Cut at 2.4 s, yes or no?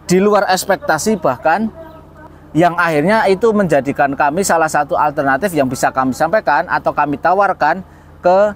yes